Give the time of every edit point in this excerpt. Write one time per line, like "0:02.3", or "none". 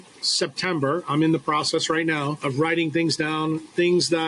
0:02.4

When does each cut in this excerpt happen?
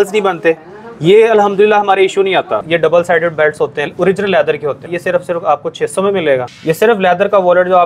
0:02.6
0:04.9
0:06.5

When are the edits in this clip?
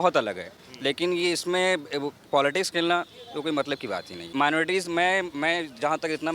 0:04.3

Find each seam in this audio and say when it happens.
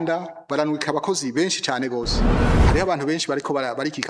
0:02.5

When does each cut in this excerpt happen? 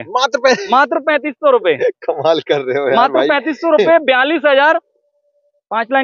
none

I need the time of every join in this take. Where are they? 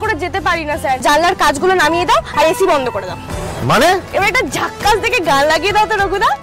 0:01.0
0:04.1

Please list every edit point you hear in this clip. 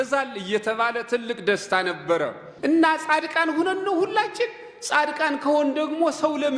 0:02.4

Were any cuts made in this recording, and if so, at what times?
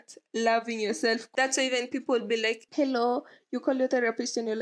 0:01.2
0:02.6

